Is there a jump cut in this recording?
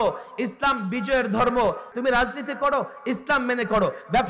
yes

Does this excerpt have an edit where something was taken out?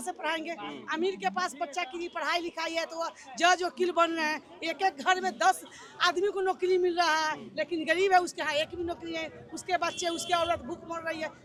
no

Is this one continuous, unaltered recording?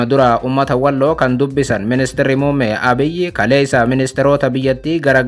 yes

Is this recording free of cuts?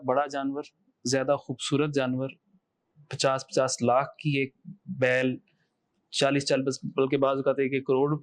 yes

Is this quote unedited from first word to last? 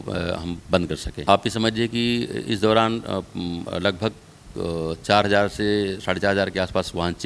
no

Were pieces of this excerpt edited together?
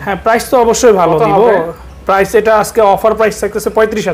no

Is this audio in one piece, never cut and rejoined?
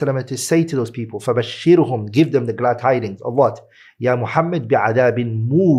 yes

